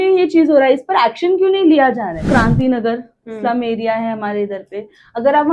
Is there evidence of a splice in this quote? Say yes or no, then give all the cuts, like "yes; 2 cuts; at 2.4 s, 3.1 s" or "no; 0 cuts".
yes; 1 cut; at 2.2 s